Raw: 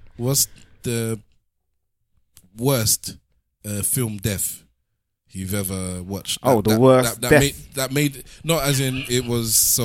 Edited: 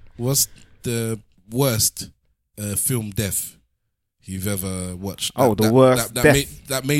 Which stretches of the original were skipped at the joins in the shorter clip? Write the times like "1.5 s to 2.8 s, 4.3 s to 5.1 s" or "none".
1.3 s to 2.4 s